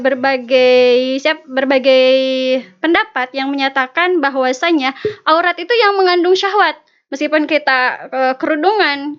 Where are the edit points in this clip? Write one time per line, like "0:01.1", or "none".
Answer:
none